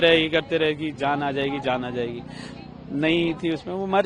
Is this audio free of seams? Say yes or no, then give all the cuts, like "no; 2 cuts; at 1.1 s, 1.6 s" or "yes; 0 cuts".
yes; 0 cuts